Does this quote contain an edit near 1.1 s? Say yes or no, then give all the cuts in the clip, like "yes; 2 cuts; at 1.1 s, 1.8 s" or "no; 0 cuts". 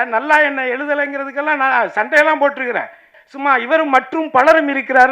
no; 1 cut; at 3.2 s